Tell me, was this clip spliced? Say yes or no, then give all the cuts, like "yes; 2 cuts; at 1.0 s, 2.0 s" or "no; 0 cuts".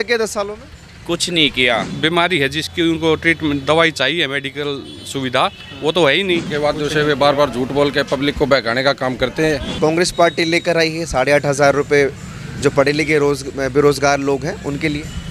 yes; 3 cuts; at 1.9 s, 6.5 s, 9.7 s